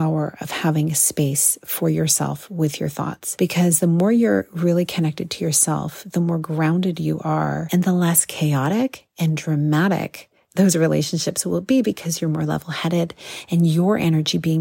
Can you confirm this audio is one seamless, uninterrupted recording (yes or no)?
no